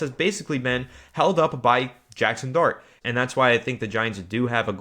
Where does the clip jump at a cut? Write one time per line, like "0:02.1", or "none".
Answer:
0:02.9